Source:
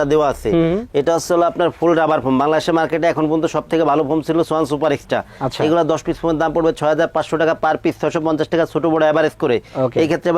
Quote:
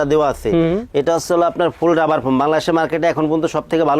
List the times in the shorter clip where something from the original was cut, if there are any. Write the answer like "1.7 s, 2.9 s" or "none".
none